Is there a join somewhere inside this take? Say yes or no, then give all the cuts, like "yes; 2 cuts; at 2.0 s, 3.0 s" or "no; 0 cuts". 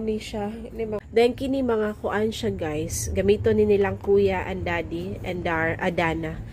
yes; 1 cut; at 1.0 s